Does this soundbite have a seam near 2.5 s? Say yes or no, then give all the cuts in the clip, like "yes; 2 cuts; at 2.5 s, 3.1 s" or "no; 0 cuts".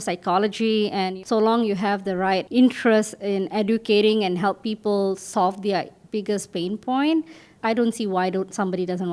yes; 3 cuts; at 1.2 s, 2.5 s, 7.5 s